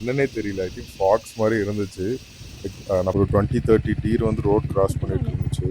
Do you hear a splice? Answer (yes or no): yes